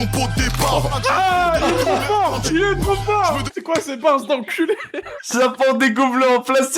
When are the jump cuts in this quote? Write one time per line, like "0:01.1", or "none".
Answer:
0:03.5
0:05.1

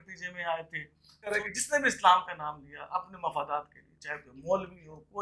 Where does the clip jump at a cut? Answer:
0:01.4

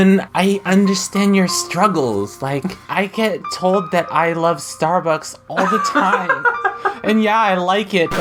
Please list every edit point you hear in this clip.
none

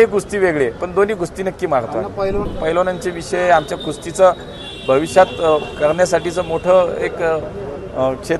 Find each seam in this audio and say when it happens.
0:02.5

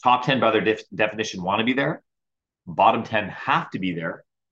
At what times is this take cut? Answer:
none

